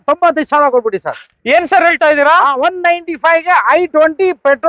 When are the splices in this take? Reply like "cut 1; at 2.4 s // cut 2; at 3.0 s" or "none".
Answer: none